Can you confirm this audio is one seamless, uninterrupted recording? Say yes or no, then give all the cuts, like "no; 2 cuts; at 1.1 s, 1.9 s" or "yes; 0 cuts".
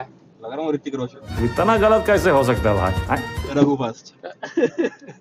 yes; 0 cuts